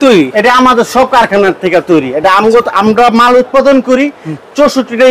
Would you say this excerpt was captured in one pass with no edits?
yes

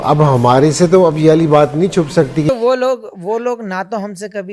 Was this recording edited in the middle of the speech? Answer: yes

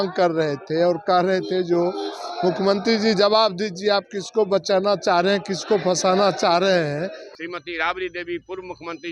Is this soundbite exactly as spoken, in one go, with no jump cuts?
no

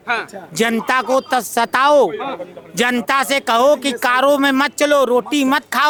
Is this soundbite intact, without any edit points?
yes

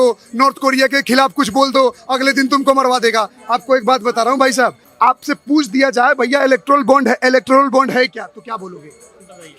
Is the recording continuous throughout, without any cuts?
no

